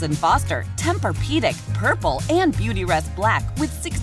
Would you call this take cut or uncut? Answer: uncut